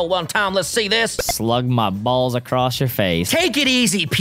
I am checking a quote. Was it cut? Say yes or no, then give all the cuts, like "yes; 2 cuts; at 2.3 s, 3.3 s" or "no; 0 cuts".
yes; 2 cuts; at 1.2 s, 3.3 s